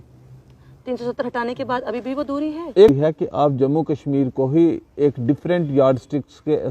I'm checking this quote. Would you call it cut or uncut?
cut